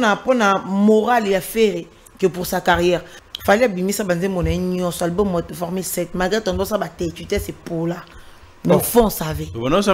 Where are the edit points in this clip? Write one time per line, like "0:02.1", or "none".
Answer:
0:03.2